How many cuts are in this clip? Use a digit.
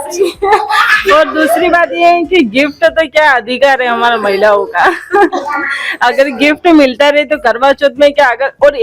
0